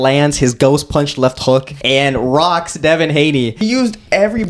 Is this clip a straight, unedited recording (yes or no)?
no